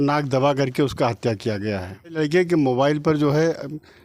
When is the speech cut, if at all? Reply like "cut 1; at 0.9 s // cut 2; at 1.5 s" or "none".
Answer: cut 1; at 2.2 s